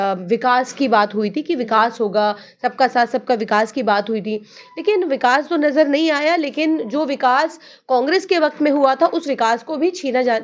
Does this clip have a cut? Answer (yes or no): no